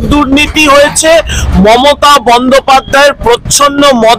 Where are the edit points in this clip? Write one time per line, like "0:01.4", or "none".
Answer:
none